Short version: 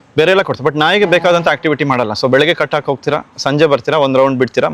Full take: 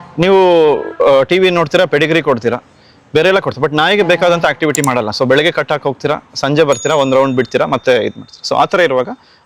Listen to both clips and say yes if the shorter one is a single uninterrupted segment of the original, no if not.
yes